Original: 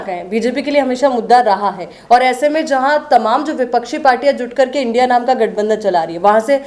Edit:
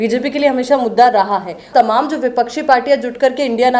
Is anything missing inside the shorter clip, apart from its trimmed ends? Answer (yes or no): yes